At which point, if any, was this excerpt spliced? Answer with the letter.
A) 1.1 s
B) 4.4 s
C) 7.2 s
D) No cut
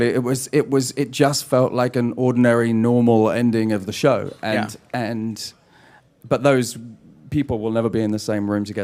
C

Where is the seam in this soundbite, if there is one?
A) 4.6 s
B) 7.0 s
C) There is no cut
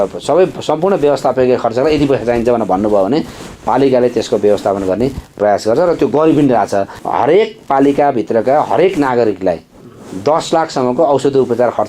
B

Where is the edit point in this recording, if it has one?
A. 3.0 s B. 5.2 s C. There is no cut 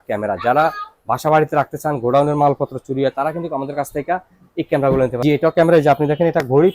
B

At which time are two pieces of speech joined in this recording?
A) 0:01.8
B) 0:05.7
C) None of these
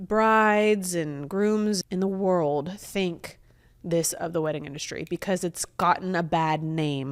A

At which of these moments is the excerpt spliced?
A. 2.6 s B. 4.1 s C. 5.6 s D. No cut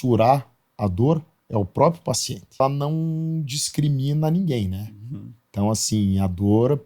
A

